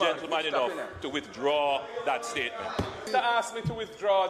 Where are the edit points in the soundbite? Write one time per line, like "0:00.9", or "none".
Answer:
0:03.1